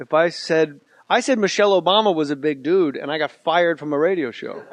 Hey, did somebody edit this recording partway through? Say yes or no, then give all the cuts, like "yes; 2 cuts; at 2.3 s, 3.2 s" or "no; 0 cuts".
no; 0 cuts